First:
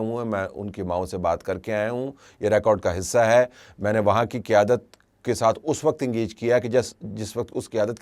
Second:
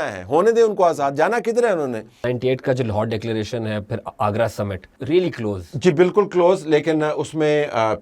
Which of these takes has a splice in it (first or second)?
second